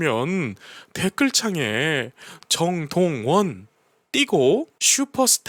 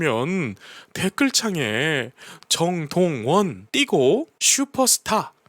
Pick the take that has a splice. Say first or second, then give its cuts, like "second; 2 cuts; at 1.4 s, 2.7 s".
second; 1 cut; at 3.6 s